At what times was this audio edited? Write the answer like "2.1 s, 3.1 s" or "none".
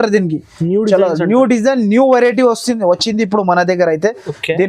none